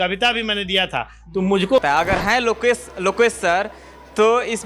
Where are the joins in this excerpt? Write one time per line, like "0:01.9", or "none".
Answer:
0:01.8